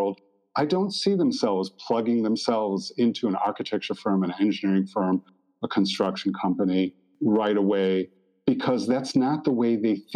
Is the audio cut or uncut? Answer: uncut